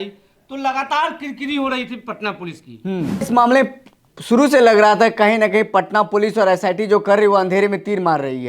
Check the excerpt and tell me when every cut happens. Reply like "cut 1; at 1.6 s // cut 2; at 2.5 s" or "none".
cut 1; at 3.3 s

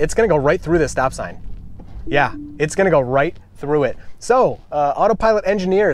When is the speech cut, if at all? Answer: none

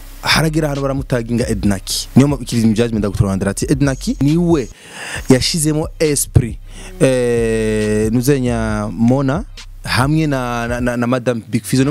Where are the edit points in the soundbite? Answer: cut 1; at 4.2 s

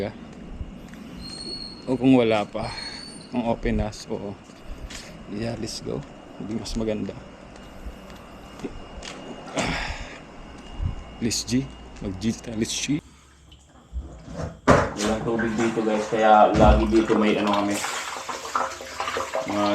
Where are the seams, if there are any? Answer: cut 1; at 13.0 s

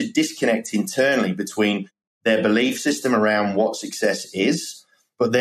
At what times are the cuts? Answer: none

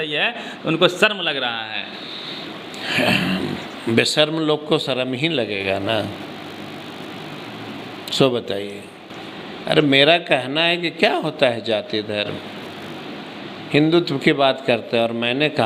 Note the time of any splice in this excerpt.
none

